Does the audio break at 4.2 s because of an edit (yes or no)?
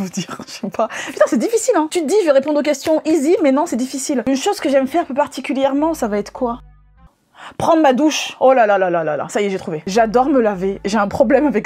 no